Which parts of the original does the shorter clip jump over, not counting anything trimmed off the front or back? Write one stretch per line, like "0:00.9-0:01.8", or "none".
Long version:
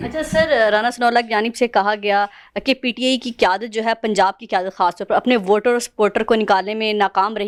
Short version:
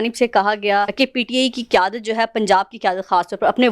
0:02.3-0:02.6

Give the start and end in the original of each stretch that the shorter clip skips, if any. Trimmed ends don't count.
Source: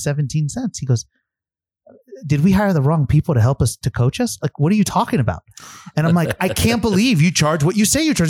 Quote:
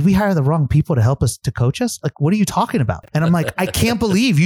0:05.4-0:05.8

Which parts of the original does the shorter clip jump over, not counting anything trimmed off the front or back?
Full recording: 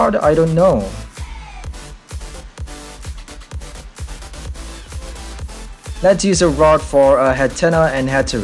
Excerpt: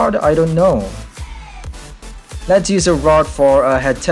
0:02.0-0:05.6

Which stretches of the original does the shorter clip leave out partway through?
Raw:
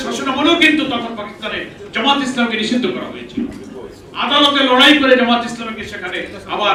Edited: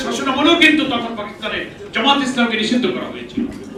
none

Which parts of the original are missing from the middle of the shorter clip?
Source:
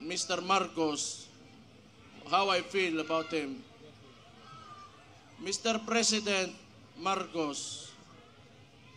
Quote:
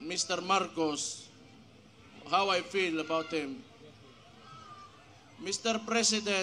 none

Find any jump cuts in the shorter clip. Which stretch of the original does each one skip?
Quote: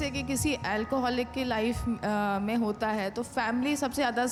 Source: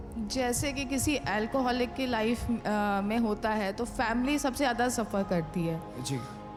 none

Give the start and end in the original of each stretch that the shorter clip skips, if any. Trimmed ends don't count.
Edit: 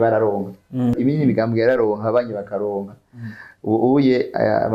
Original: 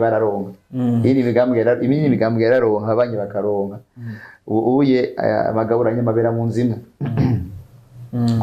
0:00.9-0:01.8

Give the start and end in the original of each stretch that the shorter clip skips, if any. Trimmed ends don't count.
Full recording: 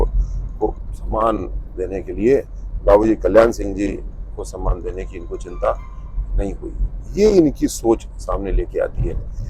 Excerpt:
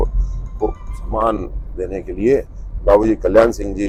none

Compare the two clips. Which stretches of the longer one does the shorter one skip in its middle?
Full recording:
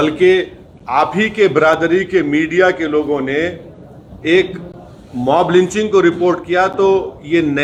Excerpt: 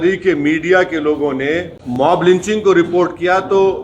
0:03.6-0:05.0

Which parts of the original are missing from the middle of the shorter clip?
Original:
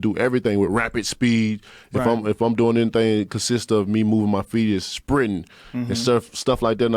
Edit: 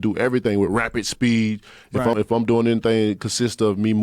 0:02.1-0:02.2

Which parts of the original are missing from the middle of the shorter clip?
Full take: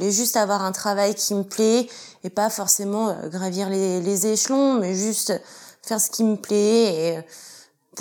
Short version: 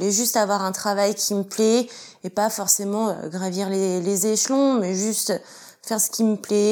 none

